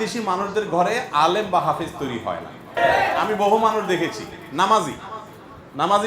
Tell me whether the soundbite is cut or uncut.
cut